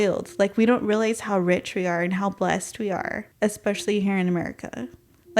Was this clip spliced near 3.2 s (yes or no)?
yes